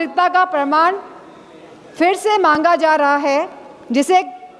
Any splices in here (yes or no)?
no